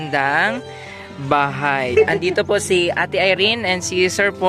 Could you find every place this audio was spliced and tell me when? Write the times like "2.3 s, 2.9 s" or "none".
1.9 s